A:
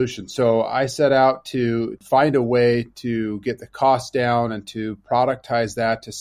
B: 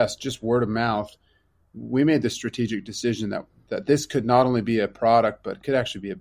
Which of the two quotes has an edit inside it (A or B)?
A